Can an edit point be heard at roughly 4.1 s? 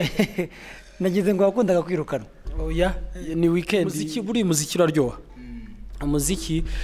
yes; 1 cut; at 4.1 s

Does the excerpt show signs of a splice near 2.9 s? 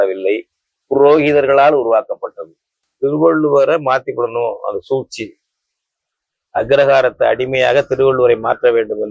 yes; 1 cut; at 2.9 s

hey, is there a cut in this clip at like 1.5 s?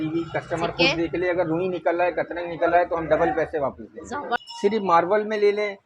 no; 1 cut; at 4.4 s

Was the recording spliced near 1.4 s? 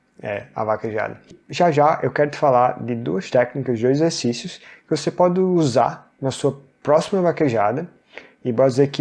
yes; 1 cut; at 1.4 s

